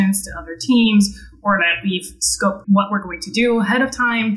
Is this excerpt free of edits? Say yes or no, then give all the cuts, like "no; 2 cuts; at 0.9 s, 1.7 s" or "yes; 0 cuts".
no; 1 cut; at 2.6 s